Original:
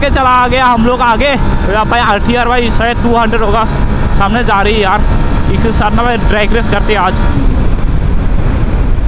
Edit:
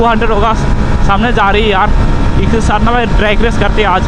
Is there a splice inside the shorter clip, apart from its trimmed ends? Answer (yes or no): no